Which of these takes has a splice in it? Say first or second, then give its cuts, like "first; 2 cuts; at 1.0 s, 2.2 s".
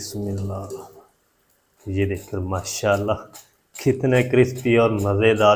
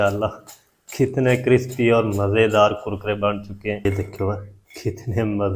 second; 1 cut; at 3.9 s